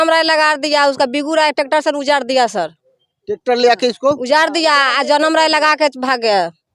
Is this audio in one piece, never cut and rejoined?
yes; 0 cuts

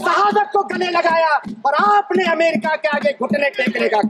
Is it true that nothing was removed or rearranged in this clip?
yes; 0 cuts

